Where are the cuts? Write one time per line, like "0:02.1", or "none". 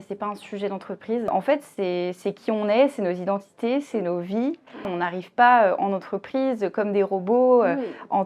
0:01.3
0:04.9